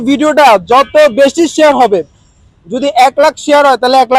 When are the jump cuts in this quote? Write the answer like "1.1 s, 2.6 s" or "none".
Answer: none